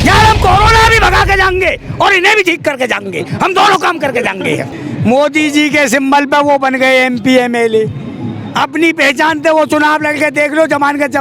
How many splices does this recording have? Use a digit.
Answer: 1